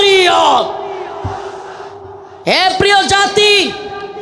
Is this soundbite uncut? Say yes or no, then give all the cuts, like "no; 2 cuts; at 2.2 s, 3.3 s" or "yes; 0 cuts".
no; 1 cut; at 2.2 s